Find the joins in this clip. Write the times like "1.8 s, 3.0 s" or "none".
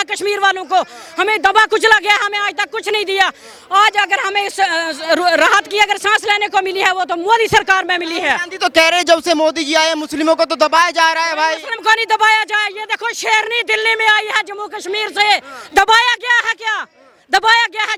none